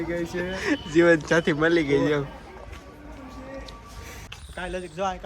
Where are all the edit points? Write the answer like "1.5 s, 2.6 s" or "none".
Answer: 4.2 s

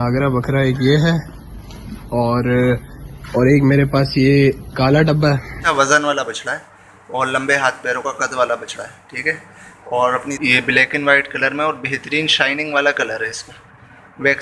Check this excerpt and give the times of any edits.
5.5 s, 10.2 s

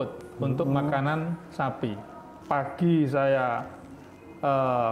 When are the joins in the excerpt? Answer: 2.3 s

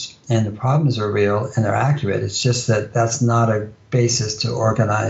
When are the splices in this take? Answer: none

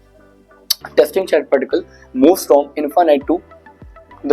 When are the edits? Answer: none

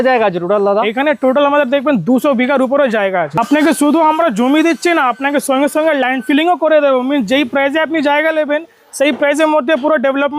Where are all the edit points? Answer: none

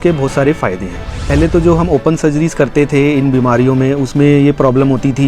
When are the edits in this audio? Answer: 1.3 s

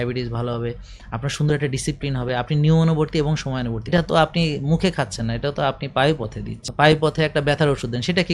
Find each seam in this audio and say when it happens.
3.8 s, 6.6 s

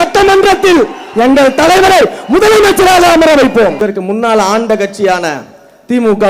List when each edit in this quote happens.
3.8 s

